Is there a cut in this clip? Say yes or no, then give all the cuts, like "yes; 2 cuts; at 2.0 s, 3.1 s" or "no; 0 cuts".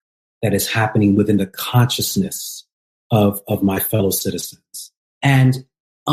no; 0 cuts